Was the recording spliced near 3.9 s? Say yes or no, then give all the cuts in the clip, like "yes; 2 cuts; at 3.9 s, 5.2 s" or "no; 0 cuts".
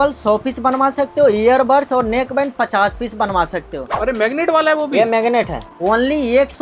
yes; 2 cuts; at 3.9 s, 5.7 s